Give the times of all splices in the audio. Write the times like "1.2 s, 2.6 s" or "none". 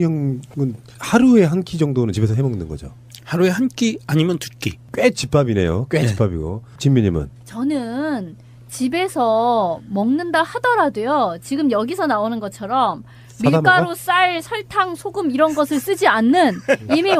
7.9 s

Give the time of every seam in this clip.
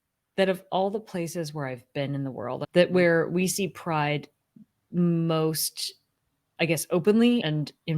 2.6 s

